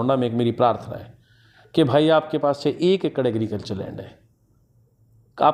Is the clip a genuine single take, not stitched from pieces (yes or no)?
yes